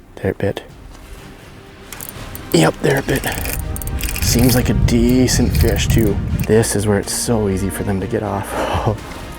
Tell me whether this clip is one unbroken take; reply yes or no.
no